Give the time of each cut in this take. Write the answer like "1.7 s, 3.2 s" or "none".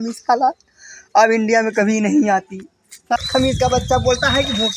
3.2 s